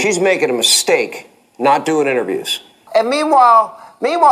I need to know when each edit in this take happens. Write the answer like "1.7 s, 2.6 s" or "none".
2.8 s